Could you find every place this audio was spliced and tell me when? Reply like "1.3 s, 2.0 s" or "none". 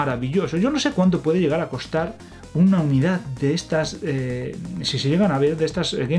none